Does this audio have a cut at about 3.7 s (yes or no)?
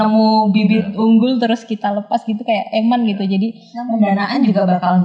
yes